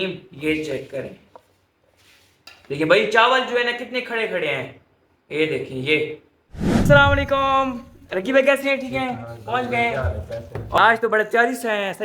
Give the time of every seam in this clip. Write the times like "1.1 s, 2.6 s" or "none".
6.8 s, 10.8 s